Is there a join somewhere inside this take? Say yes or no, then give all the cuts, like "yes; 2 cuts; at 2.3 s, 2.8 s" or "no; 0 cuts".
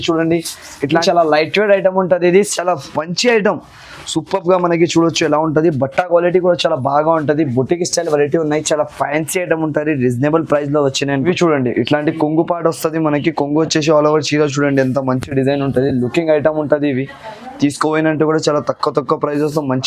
yes; 2 cuts; at 0.9 s, 11.2 s